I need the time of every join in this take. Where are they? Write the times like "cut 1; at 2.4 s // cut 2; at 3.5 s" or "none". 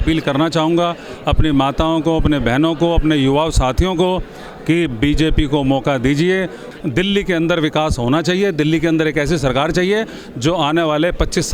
cut 1; at 6.7 s